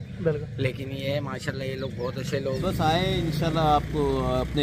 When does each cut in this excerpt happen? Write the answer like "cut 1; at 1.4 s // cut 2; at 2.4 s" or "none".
cut 1; at 2.6 s